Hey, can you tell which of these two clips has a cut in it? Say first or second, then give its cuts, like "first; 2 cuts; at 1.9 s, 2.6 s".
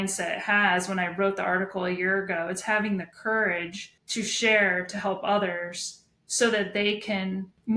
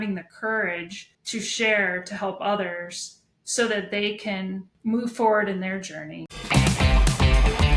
second; 1 cut; at 6.2 s